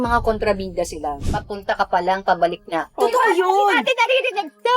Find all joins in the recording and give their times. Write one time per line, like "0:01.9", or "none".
0:01.2